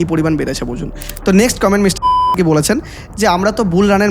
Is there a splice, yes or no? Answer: yes